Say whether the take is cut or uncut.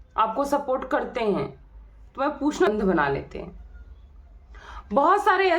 cut